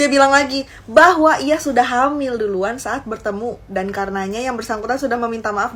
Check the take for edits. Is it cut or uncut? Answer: uncut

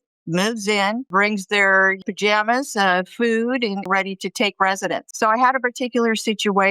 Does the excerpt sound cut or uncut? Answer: cut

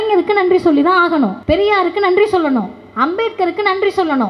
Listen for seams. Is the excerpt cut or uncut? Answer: cut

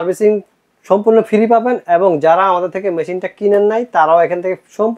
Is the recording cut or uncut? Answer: uncut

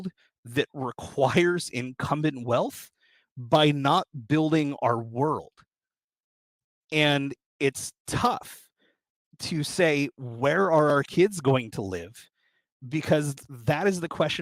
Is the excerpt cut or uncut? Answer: uncut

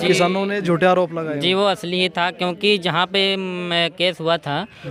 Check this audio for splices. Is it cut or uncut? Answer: uncut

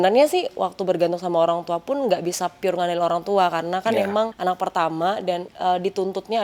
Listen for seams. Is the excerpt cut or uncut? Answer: cut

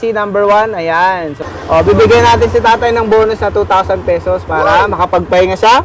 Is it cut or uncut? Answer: cut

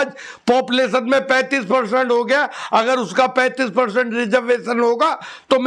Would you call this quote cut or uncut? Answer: uncut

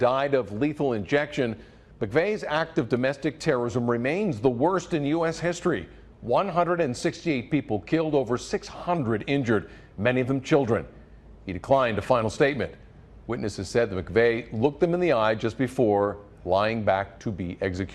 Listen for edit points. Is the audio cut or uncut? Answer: cut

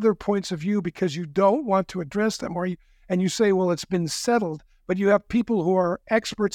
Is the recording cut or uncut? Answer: uncut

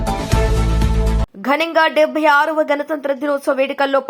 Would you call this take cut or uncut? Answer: uncut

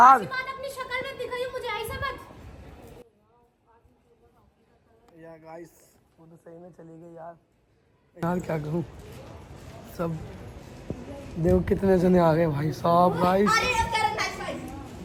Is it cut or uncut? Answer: uncut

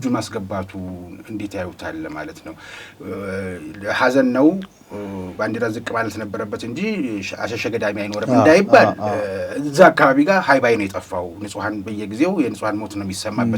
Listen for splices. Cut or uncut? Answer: uncut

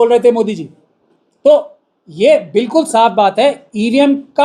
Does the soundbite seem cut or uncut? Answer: uncut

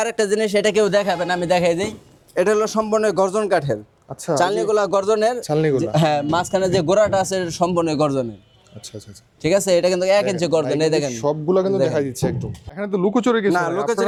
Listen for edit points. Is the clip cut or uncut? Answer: uncut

